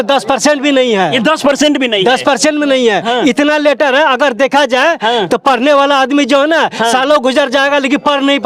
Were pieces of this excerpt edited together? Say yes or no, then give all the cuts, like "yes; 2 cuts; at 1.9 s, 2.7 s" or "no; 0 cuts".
no; 0 cuts